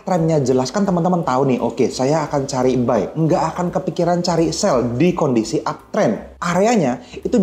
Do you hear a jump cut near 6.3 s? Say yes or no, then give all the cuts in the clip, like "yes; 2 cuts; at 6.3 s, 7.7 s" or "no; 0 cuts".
no; 0 cuts